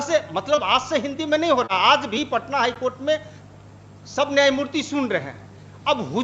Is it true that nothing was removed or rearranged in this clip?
yes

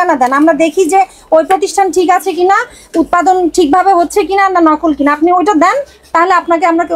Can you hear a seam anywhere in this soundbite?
no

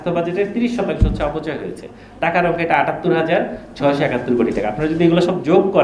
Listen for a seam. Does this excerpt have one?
no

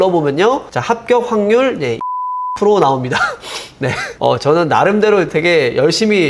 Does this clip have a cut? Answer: no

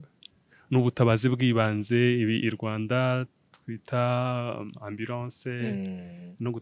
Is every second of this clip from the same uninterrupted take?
yes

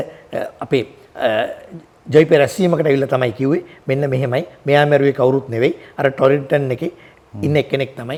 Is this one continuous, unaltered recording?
yes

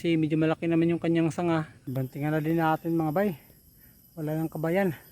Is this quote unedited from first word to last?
no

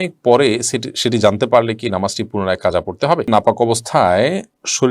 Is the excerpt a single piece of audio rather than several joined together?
no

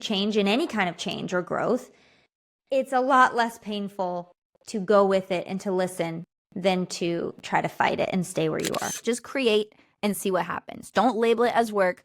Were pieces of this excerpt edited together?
yes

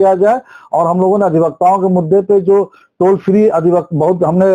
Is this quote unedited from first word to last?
yes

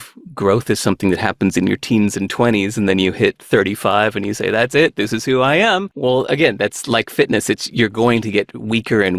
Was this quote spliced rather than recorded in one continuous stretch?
yes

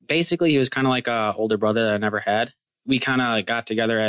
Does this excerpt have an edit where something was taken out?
yes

